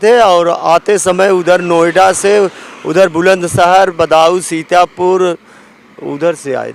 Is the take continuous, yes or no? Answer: yes